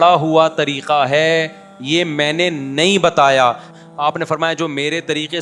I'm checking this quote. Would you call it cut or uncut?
cut